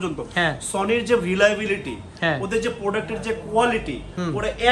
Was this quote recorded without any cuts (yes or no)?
yes